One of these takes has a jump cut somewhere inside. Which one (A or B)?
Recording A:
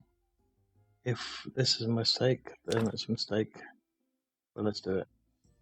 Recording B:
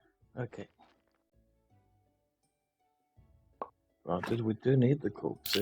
B